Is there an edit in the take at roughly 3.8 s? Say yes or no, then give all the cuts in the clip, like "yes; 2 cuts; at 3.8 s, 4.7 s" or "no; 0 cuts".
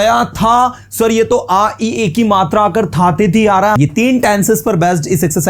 yes; 1 cut; at 3.8 s